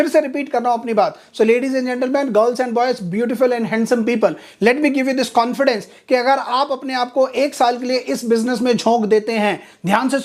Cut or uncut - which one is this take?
uncut